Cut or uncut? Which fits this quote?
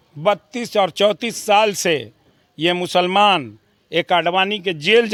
uncut